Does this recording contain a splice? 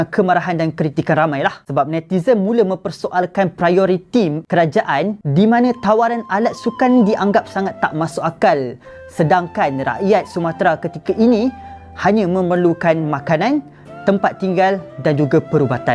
no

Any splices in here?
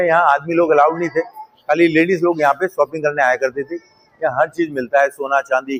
no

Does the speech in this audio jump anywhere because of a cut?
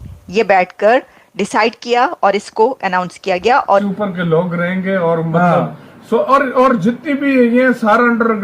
yes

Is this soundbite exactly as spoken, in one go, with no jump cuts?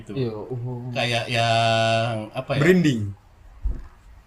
no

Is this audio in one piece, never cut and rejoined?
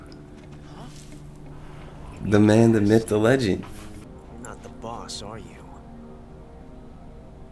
no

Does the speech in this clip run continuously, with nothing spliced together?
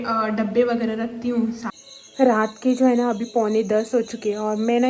no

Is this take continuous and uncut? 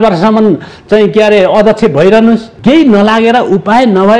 no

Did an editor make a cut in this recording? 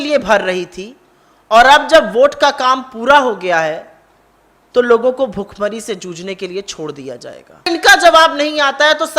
yes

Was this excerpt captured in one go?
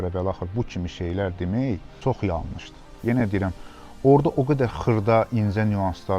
no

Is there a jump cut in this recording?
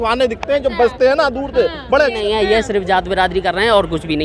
yes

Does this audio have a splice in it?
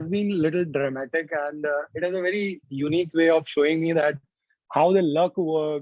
no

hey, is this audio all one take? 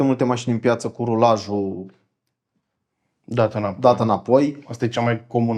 yes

